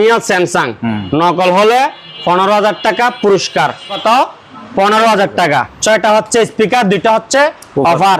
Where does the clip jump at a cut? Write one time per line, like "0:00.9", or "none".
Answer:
0:04.0
0:05.7